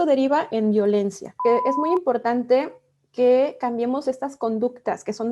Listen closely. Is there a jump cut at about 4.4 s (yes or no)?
no